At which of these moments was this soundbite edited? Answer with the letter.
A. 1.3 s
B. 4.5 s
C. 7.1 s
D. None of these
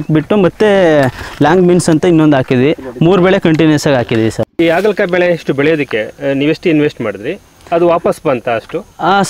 B